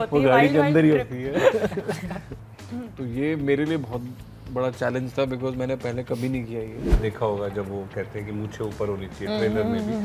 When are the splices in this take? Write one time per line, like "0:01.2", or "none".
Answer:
0:02.3
0:06.9